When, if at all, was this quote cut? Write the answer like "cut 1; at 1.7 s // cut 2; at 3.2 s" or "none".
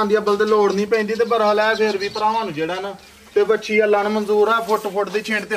none